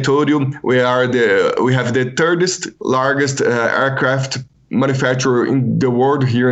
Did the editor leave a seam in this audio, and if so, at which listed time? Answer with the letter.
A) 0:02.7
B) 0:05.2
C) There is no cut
A